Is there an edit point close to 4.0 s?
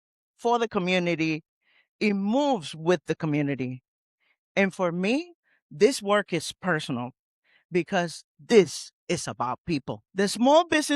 no; 1 cut; at 10.1 s

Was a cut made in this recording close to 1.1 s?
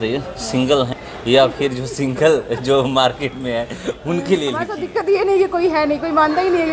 yes; 2 cuts; at 1.1 s, 4.8 s

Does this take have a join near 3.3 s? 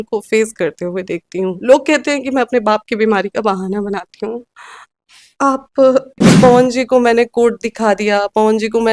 no; 2 cuts; at 1.6 s, 6.3 s

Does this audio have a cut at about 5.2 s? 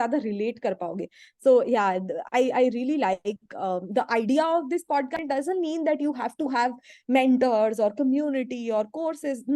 yes; 1 cut; at 5.2 s

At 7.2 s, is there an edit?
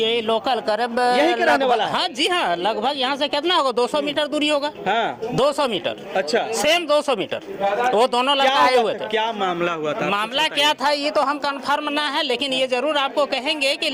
no; 0 cuts

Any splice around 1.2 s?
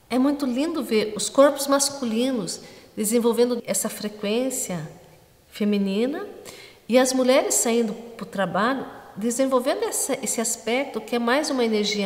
yes; 2 cuts; at 1.2 s, 3.6 s

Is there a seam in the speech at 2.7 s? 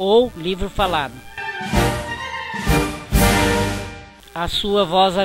no; 2 cuts; at 1.3 s, 4.2 s

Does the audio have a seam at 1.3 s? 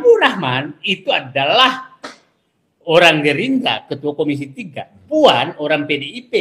no; 0 cuts

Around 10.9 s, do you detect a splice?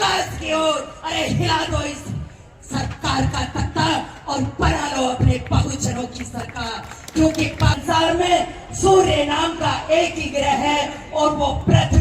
no; 1 cut; at 7.8 s

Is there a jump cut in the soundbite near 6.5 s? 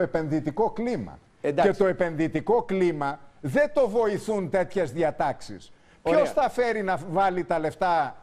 yes; 1 cut; at 6.5 s

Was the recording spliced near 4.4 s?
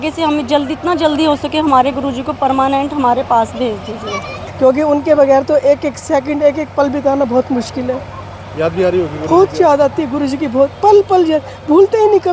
yes; 1 cut; at 4.4 s

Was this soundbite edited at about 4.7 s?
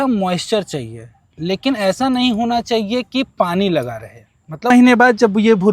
yes; 1 cut; at 4.7 s

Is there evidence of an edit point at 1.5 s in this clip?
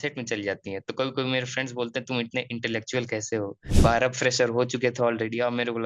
no; 1 cut; at 3.6 s

